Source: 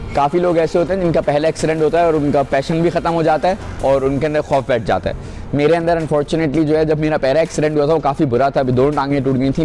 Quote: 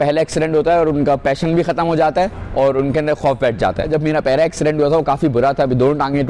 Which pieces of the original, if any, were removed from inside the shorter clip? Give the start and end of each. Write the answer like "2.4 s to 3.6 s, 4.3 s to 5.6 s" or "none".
5.2 s to 6.9 s